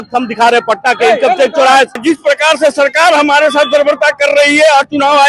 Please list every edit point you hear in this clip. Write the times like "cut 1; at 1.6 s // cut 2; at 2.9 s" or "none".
cut 1; at 2.0 s